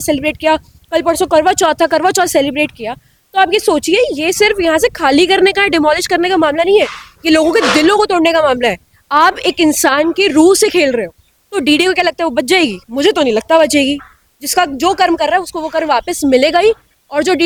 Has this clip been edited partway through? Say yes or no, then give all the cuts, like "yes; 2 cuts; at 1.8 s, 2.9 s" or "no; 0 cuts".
no; 0 cuts